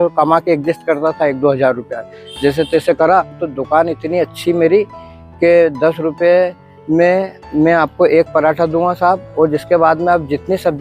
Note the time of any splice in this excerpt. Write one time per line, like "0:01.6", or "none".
0:03.5
0:05.0